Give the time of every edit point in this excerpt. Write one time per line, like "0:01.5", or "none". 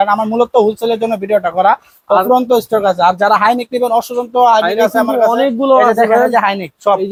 none